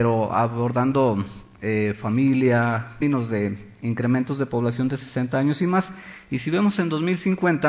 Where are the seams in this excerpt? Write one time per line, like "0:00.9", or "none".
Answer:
none

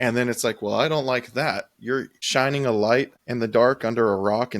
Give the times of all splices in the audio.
0:02.3

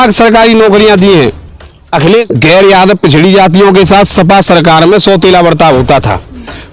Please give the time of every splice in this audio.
0:02.2

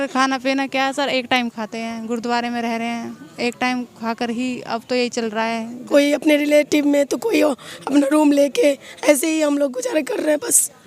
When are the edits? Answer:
0:05.8

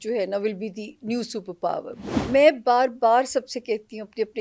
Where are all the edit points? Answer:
0:02.2

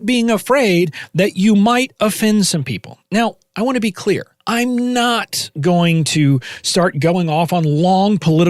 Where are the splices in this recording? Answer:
0:04.3

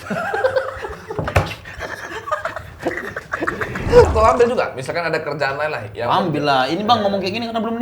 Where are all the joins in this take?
0:04.1

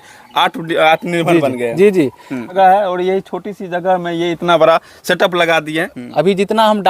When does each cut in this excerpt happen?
0:02.5
0:05.9

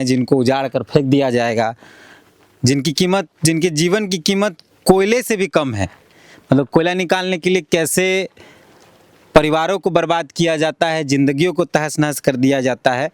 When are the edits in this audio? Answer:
none

